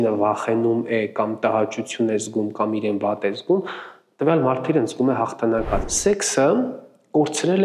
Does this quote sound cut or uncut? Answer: cut